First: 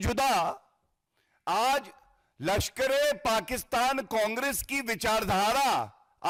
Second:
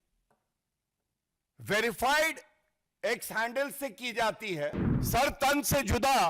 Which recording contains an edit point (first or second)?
second